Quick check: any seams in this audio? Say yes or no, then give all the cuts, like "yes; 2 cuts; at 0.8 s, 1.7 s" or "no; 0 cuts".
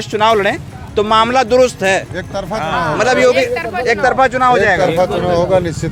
no; 0 cuts